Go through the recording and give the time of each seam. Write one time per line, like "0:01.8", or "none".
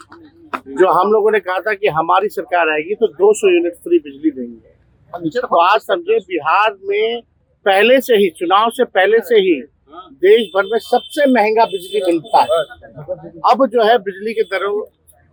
none